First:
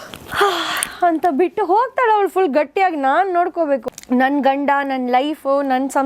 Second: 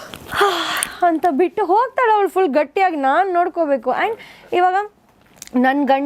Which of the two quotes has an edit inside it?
first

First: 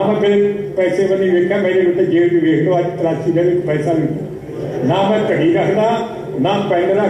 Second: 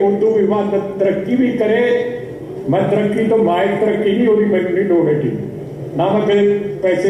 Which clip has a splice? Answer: second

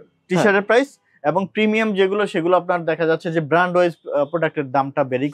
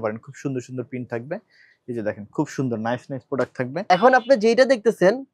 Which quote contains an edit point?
second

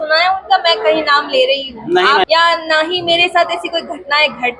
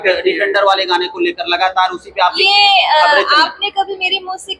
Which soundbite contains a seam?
first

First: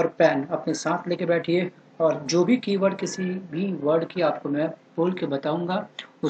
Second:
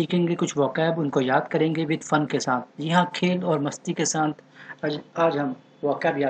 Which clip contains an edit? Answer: first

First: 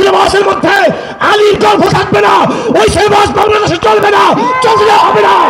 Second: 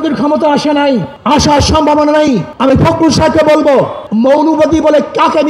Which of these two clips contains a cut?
second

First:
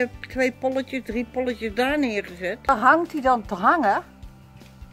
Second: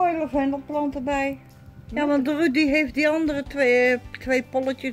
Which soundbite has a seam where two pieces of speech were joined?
first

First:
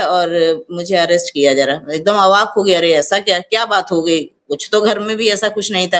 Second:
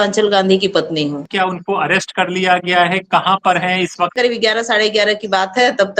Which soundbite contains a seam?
second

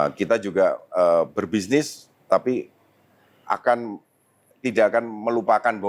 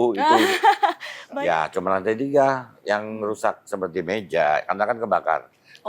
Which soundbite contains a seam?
second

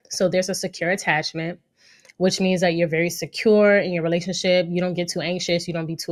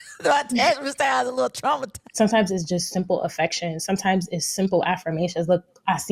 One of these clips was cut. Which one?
second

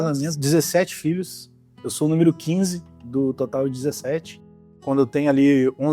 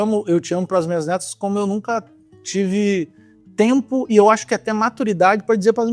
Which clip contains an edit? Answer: first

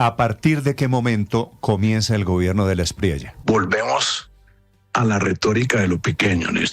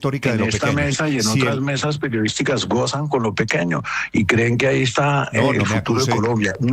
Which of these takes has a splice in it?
first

